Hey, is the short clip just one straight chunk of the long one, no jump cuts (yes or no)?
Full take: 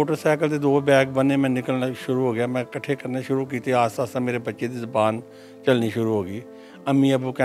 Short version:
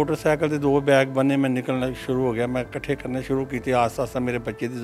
yes